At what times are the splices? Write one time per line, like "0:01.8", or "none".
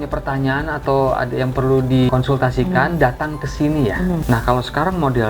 0:02.1
0:04.2